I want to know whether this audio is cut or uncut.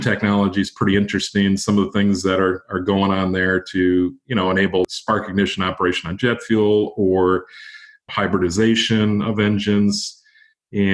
uncut